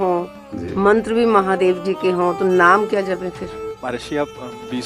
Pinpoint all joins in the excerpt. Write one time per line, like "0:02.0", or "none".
0:03.8